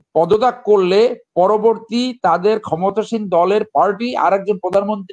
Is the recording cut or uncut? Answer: uncut